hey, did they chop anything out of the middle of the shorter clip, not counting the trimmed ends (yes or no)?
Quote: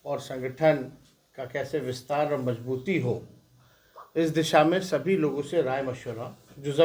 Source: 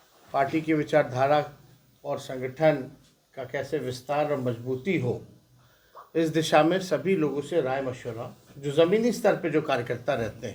no